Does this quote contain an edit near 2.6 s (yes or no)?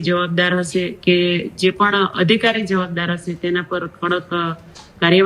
no